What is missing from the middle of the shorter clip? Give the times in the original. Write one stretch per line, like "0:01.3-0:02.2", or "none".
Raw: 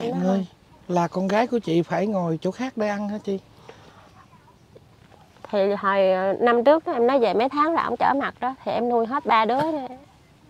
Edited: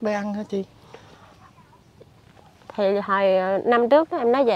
none